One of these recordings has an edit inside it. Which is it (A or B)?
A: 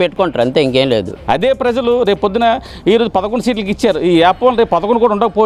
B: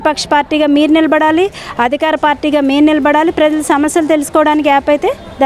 A